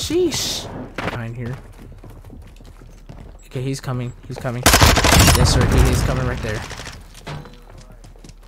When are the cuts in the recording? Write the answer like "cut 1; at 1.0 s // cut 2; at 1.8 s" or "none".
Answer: cut 1; at 1.1 s